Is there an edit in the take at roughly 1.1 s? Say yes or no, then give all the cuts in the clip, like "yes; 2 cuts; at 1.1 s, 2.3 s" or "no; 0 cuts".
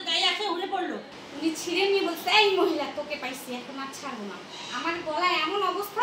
yes; 1 cut; at 1.1 s